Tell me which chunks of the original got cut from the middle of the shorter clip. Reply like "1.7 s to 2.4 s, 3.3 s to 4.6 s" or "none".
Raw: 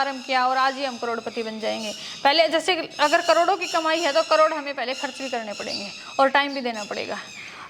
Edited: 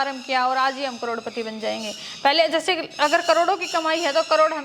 none